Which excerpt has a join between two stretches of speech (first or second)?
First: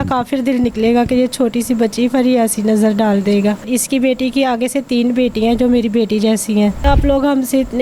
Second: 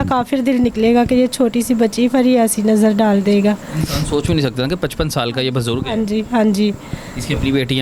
first